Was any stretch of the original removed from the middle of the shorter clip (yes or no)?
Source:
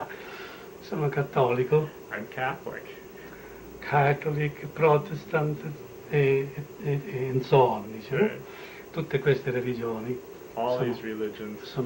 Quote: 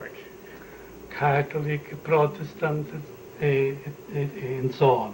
no